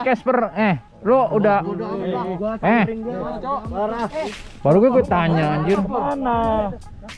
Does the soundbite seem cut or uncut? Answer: uncut